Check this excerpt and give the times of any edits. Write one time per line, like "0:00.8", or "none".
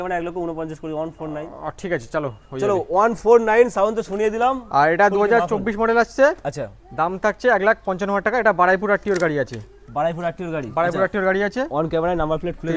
none